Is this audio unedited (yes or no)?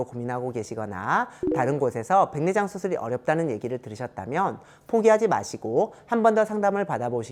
yes